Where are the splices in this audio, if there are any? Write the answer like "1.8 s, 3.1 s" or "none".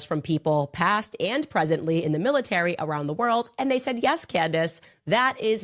none